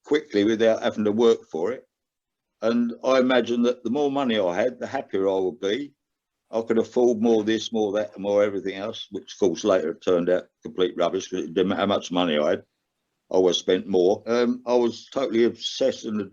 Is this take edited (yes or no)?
yes